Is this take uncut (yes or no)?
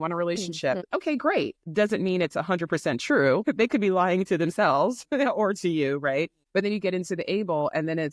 no